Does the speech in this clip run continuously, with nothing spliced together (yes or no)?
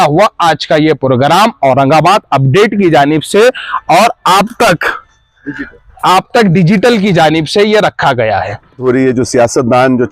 no